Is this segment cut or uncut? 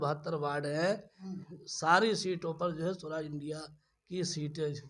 uncut